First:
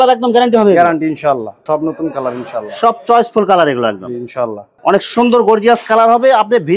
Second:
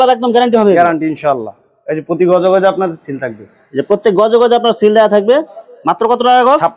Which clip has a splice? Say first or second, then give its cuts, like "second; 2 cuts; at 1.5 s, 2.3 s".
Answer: first; 2 cuts; at 1.6 s, 4.7 s